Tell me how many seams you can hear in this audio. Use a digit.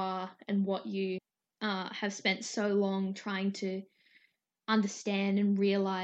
1